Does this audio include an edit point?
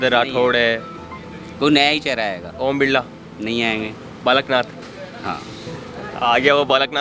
no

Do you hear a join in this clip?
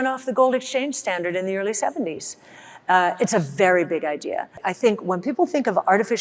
yes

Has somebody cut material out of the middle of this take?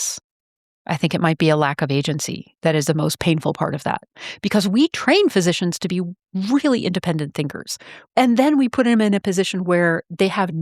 yes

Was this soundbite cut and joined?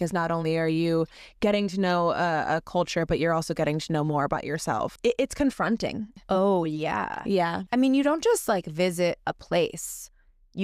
yes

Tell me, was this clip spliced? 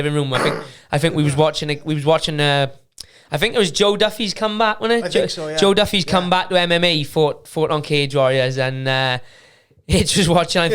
no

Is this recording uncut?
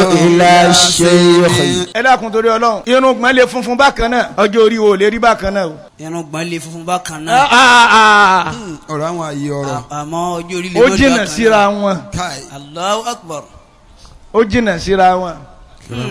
no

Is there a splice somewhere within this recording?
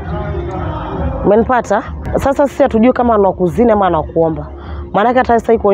yes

